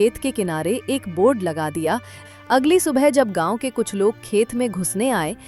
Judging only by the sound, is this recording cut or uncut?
cut